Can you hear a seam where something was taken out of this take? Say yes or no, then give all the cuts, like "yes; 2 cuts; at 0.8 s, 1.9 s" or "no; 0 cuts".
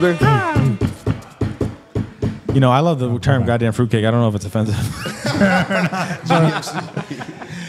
no; 0 cuts